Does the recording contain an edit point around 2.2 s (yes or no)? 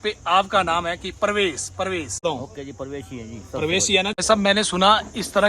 yes